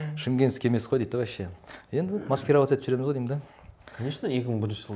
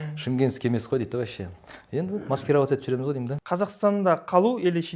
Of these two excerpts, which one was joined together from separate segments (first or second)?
second